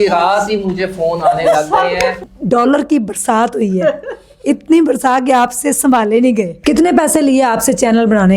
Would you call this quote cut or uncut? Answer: cut